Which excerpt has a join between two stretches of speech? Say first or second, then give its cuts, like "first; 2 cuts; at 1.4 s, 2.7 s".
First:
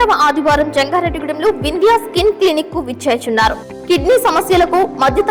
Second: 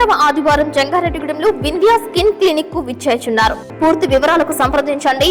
second; 1 cut; at 3.6 s